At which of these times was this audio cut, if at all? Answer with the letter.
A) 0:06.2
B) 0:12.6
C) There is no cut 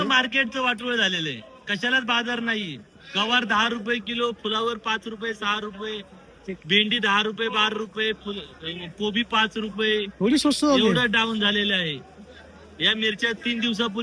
C